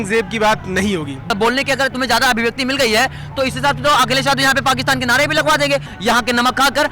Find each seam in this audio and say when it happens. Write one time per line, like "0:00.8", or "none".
0:01.3
0:05.9